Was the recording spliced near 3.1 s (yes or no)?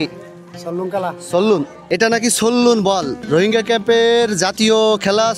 no